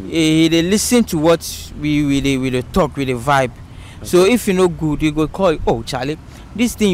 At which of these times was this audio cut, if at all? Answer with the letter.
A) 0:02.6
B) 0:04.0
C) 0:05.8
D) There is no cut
D